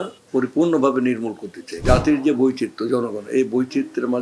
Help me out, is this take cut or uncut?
cut